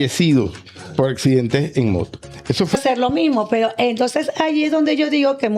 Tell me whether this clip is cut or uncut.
cut